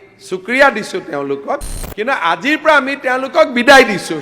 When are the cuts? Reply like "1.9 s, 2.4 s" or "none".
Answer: 1.8 s